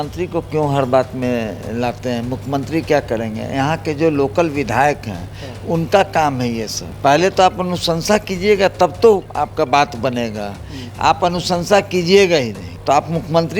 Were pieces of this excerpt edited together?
yes; 3 cuts; at 6.8 s, 9.3 s, 12.7 s

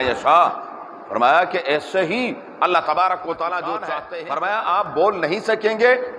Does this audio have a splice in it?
yes; 1 cut; at 4.0 s

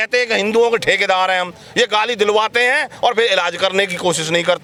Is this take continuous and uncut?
yes; 0 cuts

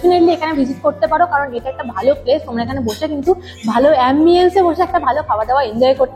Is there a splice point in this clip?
no; 0 cuts

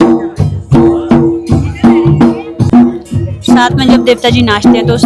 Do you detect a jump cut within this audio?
yes; 1 cut; at 2.6 s

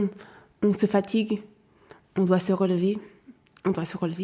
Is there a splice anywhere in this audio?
no; 0 cuts

